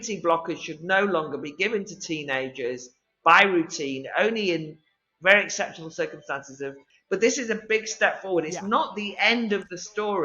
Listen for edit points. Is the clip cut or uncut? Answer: cut